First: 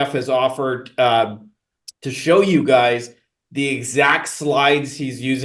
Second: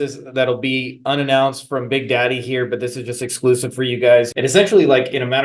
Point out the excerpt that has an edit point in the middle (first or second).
second